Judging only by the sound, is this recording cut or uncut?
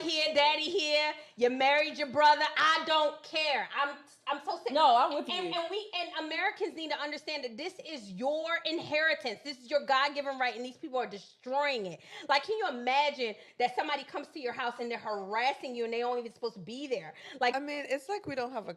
cut